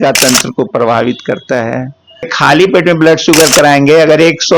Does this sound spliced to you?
yes; 1 cut; at 2.3 s

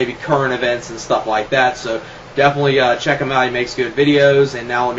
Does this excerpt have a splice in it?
yes; 1 cut; at 3.9 s

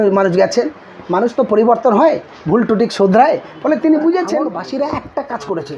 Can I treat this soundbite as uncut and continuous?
no; 1 cut; at 4.5 s

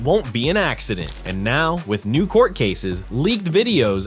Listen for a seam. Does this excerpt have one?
yes; 1 cut; at 1.2 s

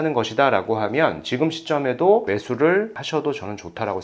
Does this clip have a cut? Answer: yes; 1 cut; at 3.0 s

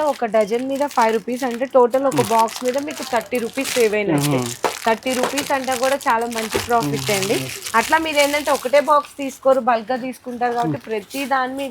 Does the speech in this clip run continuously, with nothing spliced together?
yes; 0 cuts

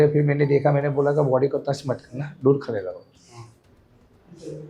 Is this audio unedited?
yes; 0 cuts

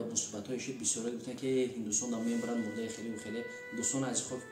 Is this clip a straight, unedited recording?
yes; 0 cuts

